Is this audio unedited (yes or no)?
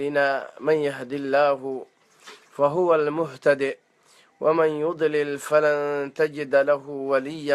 yes